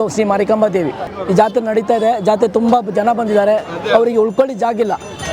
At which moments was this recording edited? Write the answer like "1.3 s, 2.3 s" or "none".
1.1 s